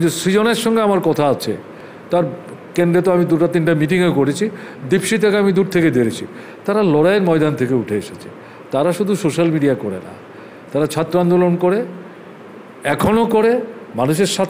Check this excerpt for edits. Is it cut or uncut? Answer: uncut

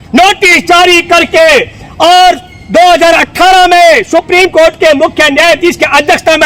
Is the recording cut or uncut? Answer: uncut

